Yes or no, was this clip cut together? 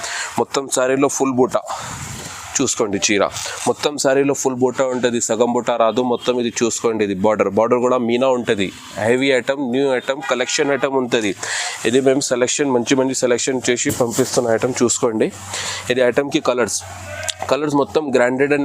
no